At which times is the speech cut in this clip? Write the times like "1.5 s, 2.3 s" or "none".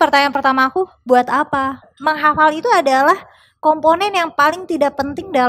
1.9 s